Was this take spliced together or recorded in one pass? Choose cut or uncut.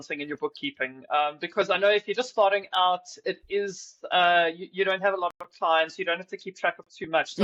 uncut